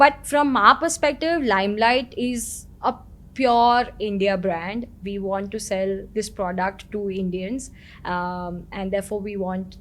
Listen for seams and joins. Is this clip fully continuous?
yes; 0 cuts

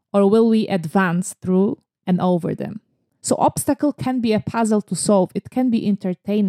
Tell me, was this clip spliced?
yes; 1 cut; at 3.1 s

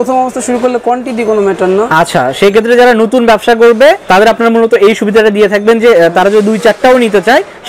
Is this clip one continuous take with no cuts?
yes; 0 cuts

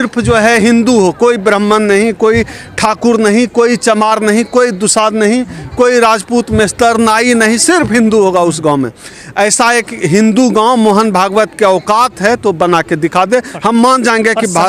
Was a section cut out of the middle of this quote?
no; 0 cuts

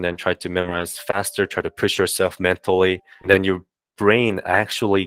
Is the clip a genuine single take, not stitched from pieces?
no; 1 cut; at 3.1 s

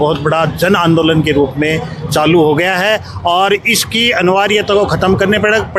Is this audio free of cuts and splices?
yes; 0 cuts

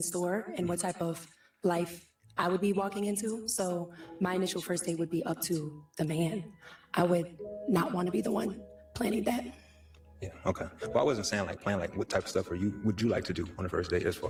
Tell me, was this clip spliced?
no; 0 cuts

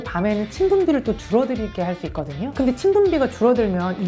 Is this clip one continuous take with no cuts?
yes; 0 cuts

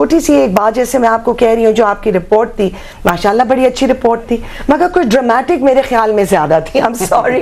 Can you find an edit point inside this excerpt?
no; 0 cuts

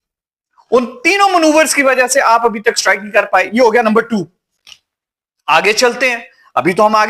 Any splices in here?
no; 0 cuts

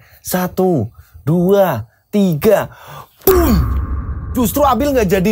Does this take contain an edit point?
no; 0 cuts

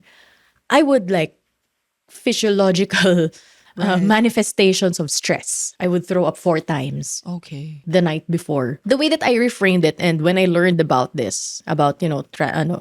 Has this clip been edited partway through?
yes; 3 cuts; at 5.7 s, 7.8 s, 8.8 s

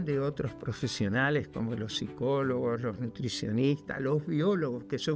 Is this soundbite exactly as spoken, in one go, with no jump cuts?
yes; 0 cuts

